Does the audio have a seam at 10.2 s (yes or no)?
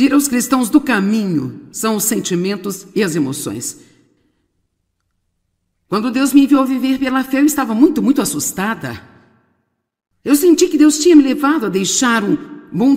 no